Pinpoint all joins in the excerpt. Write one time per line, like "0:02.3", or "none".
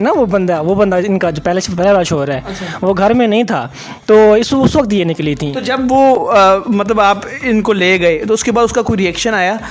none